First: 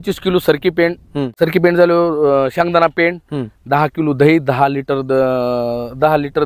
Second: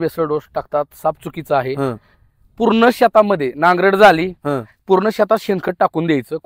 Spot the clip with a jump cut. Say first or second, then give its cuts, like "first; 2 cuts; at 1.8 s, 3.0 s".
first; 1 cut; at 1.4 s